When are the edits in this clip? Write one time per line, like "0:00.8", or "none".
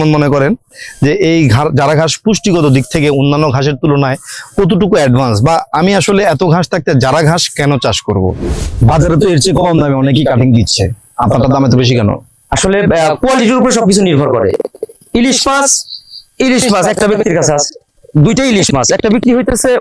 0:08.8